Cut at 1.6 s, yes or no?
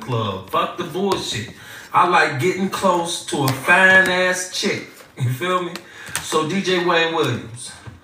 no